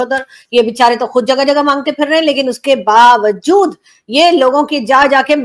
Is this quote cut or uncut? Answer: uncut